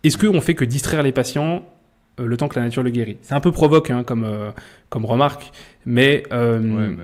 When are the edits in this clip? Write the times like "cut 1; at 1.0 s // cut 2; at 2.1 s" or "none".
none